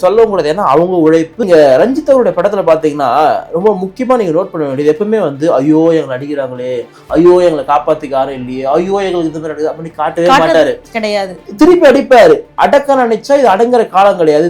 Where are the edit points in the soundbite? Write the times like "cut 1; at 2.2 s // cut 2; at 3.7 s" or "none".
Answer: cut 1; at 1.4 s